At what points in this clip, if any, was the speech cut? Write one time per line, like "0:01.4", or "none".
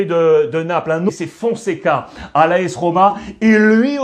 0:01.1